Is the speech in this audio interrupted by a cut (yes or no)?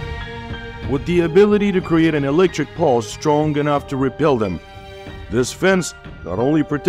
no